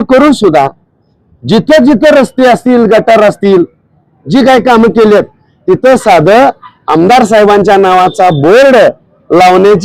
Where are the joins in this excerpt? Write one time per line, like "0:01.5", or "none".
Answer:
none

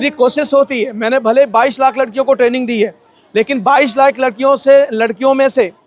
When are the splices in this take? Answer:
none

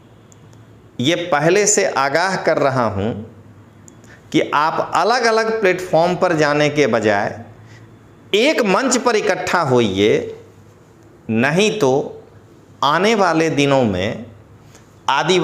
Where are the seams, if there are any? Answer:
none

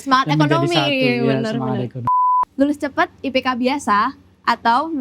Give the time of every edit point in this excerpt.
0:02.2

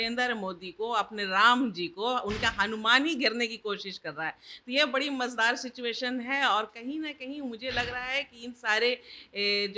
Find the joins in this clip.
none

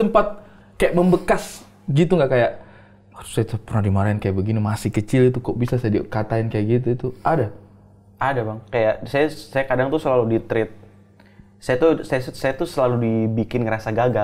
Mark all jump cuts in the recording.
none

